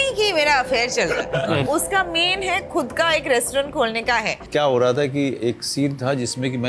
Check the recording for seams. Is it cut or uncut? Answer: cut